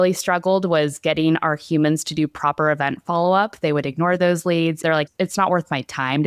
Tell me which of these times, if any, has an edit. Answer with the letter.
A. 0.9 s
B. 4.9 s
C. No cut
B